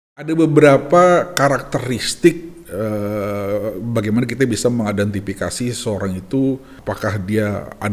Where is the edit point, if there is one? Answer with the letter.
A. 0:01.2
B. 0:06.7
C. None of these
B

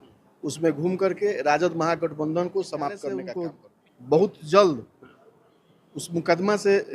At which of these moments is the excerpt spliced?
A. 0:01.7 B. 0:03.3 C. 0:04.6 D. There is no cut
B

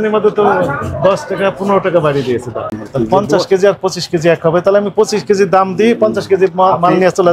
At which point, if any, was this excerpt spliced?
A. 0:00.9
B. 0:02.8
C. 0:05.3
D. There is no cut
B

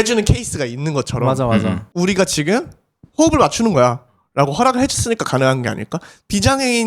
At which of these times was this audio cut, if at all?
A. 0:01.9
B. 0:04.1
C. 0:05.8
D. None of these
A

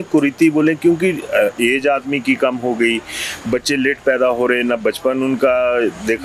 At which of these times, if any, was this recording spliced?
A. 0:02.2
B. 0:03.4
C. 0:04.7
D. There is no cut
D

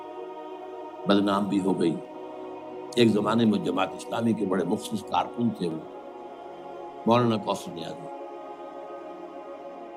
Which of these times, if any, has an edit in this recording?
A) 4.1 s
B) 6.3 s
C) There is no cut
C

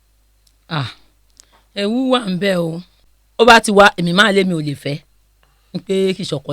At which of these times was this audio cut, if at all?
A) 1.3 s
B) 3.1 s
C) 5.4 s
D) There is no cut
B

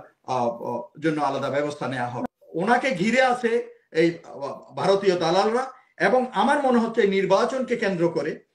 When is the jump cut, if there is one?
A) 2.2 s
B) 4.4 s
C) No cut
A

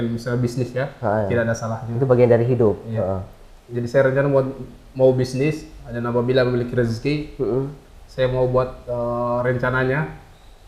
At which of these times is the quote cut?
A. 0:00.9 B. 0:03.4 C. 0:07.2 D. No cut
D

